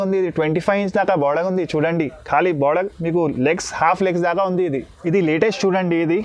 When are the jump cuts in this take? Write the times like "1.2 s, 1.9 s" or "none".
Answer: 4.9 s